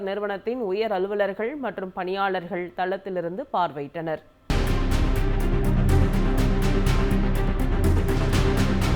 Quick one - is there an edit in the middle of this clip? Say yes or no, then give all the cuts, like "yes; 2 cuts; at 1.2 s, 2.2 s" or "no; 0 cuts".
yes; 1 cut; at 4.3 s